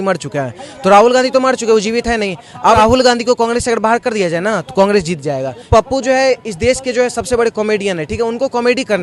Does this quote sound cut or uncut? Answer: cut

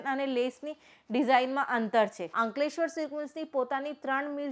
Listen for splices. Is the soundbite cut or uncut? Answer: cut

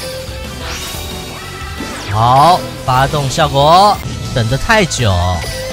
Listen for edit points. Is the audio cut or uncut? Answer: cut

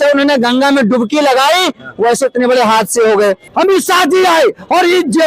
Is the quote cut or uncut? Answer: cut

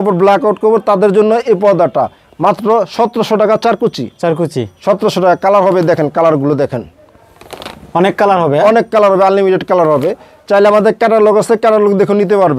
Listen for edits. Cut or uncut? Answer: uncut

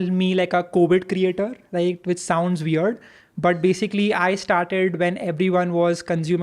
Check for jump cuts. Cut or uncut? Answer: uncut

